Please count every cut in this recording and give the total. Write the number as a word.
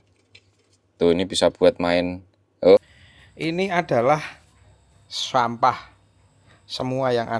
one